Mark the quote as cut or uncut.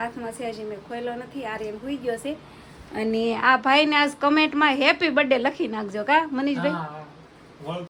uncut